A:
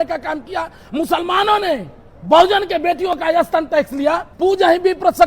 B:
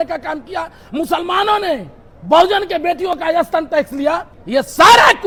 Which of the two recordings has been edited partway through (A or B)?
A